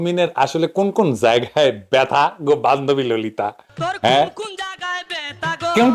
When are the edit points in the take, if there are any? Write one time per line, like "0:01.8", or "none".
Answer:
none